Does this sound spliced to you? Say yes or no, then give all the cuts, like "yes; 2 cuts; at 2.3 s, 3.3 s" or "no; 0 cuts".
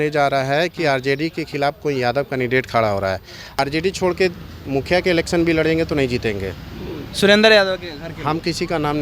yes; 1 cut; at 3.6 s